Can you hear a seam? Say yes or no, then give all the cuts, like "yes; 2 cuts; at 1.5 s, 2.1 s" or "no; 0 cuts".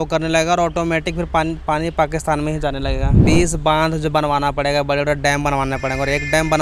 yes; 1 cut; at 3.2 s